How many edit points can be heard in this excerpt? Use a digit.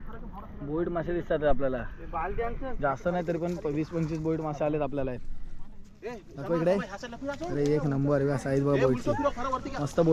0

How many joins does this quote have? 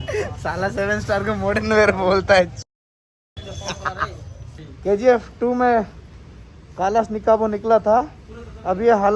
1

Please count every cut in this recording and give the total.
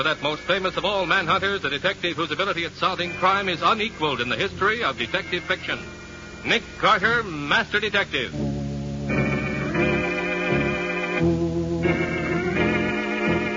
1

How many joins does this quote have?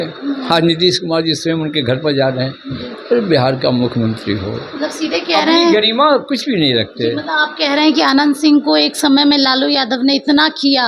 0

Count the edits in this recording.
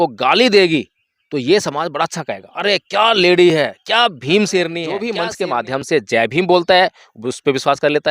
1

